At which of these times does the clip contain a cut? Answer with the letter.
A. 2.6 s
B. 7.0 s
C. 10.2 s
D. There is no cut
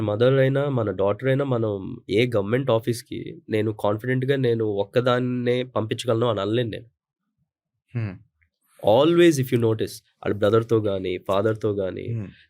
D